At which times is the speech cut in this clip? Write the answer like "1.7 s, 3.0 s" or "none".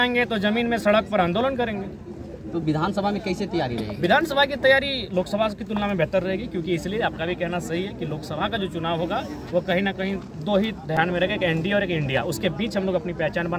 none